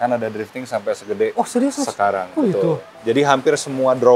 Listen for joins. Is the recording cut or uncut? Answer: cut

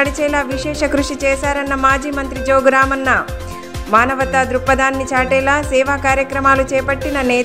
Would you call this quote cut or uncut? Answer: uncut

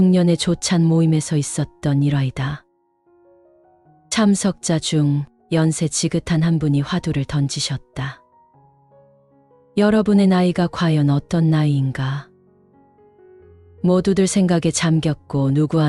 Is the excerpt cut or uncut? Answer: uncut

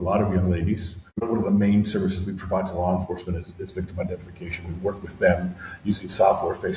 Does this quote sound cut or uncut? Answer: cut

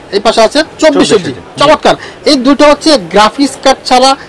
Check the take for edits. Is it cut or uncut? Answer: uncut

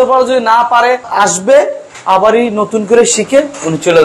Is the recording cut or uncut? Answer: uncut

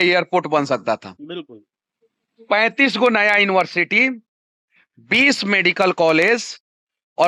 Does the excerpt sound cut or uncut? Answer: uncut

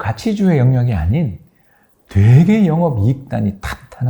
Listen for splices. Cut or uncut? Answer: uncut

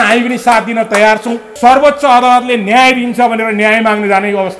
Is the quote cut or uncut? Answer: cut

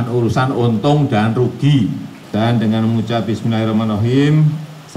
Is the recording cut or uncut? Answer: cut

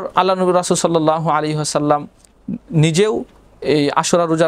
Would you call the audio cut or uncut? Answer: uncut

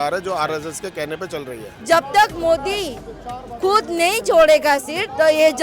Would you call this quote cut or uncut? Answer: cut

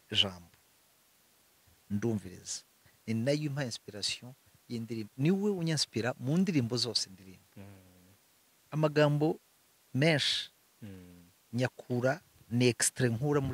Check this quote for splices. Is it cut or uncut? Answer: uncut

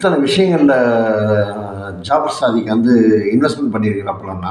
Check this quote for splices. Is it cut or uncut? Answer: uncut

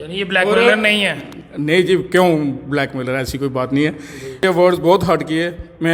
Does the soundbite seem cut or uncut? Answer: cut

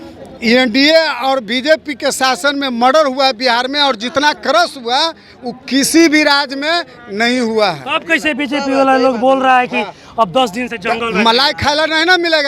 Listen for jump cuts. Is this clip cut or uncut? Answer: uncut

